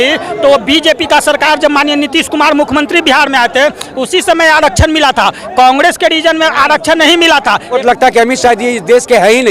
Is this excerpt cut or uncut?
cut